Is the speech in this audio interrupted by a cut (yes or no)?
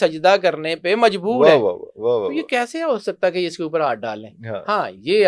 no